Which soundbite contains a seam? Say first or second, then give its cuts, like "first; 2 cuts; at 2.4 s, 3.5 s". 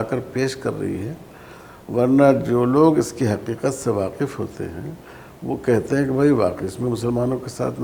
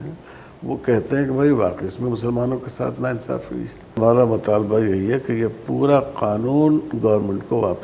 second; 1 cut; at 4.0 s